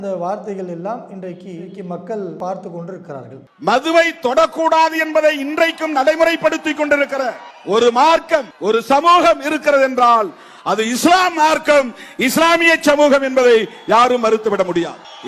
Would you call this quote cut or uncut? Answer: cut